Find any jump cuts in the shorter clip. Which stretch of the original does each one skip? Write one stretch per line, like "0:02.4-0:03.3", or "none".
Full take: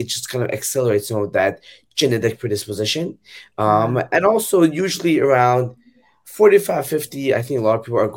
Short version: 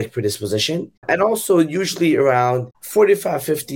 0:03.3-0:04.1
0:05.8-0:06.2